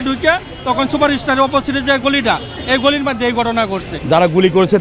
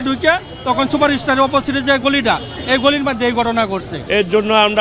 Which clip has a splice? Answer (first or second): first